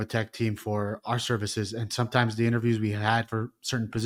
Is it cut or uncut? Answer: uncut